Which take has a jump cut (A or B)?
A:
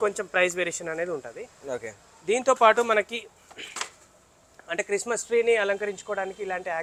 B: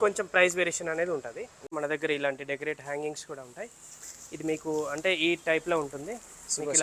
B